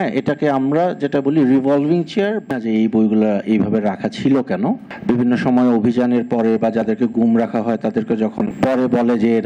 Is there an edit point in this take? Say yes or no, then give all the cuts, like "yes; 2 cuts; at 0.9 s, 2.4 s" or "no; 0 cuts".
yes; 3 cuts; at 2.5 s, 4.9 s, 8.5 s